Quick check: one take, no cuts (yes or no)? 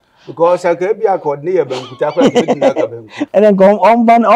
no